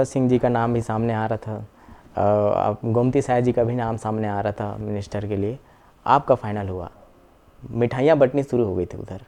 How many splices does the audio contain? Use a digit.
0